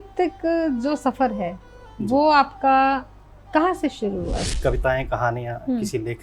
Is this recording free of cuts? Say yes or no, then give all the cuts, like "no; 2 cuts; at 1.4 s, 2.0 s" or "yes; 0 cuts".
no; 1 cut; at 4.4 s